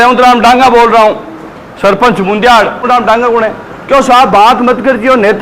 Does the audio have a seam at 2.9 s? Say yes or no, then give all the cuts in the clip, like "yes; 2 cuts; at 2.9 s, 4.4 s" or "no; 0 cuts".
yes; 1 cut; at 2.9 s